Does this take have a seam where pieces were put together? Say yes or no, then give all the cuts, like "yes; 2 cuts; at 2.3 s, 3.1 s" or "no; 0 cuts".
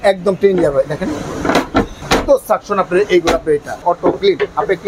yes; 2 cuts; at 2.0 s, 3.8 s